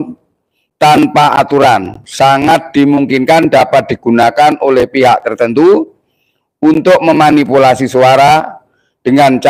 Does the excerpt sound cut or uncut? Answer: uncut